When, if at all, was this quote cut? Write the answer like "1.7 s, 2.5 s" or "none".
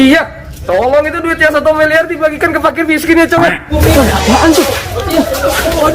3.7 s